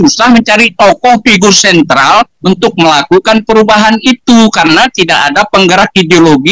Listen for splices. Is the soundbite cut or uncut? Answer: uncut